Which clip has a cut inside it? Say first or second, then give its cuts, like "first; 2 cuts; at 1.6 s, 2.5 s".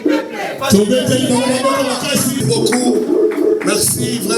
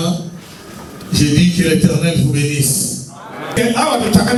first; 1 cut; at 2.4 s